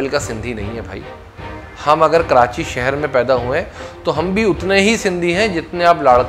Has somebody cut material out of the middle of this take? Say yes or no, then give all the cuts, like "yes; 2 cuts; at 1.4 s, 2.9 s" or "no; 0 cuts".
no; 0 cuts